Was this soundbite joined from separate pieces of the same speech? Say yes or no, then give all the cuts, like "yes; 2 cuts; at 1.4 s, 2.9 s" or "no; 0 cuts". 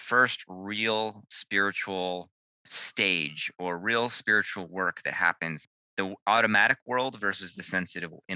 yes; 1 cut; at 5.6 s